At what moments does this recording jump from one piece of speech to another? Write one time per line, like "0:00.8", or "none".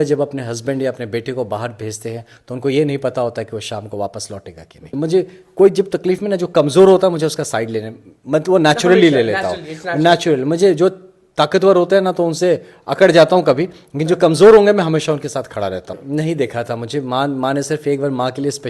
0:04.8
0:16.0